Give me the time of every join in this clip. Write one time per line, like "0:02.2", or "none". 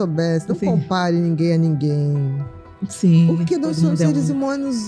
none